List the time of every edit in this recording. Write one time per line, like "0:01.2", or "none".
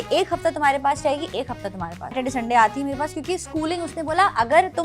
0:02.2